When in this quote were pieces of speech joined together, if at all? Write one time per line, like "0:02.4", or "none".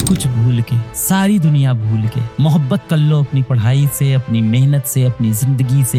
none